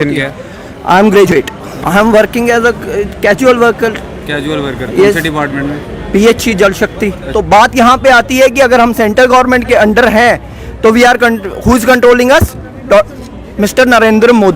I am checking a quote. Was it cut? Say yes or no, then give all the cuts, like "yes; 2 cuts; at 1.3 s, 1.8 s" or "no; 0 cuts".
yes; 2 cuts; at 1.3 s, 7.2 s